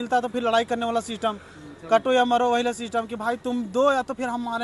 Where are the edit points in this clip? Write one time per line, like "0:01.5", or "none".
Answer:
none